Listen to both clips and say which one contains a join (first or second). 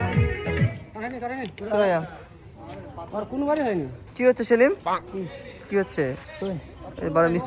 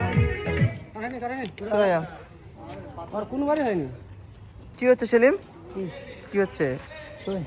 first